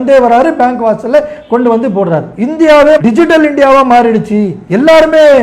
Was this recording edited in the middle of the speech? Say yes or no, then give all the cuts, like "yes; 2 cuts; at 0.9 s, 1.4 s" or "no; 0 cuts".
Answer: yes; 2 cuts; at 2.3 s, 3.0 s